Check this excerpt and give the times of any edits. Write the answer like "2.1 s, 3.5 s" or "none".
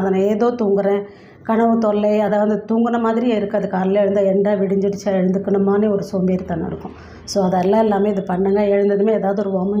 none